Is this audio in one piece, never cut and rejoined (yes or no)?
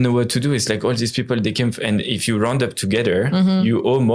yes